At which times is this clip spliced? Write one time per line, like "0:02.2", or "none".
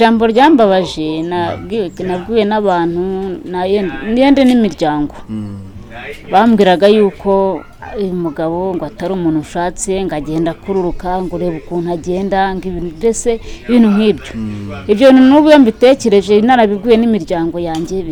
none